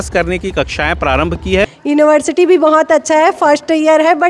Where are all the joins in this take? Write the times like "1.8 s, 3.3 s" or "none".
1.8 s